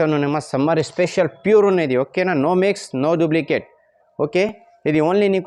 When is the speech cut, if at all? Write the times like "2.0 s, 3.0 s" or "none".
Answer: none